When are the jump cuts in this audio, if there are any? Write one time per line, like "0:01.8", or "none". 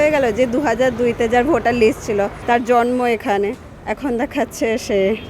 0:02.4

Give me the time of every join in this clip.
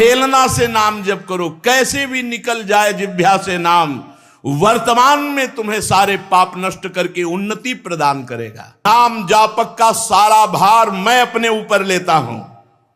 0:08.8

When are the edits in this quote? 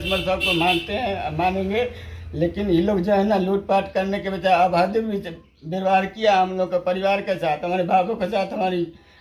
none

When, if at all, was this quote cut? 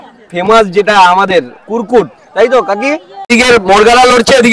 0:03.3

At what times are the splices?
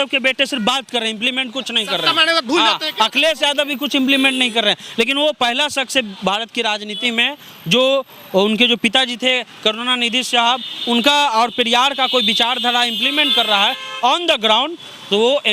none

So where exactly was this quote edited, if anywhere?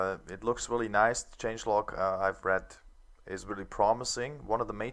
none

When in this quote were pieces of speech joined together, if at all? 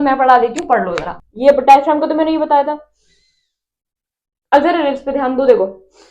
0:01.2

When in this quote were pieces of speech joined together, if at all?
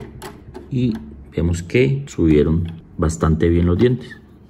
0:02.0
0:02.8

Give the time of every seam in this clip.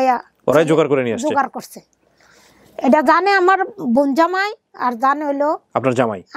none

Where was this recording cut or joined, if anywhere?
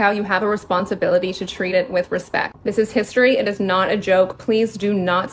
none

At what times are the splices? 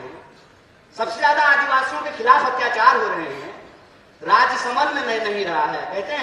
none

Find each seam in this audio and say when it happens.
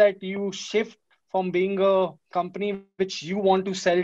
0:02.2

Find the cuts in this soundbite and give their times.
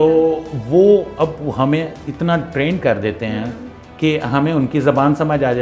none

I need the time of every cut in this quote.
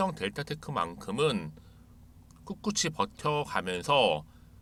none

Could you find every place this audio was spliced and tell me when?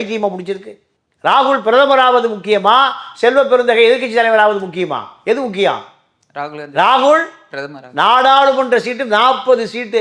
none

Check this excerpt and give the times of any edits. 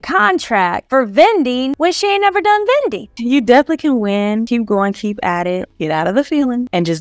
0:03.1
0:04.5
0:05.7

